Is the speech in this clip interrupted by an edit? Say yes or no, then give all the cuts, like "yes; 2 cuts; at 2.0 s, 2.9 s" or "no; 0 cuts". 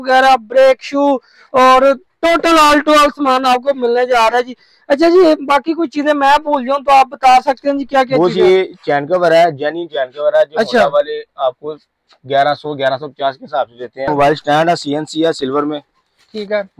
yes; 1 cut; at 14.1 s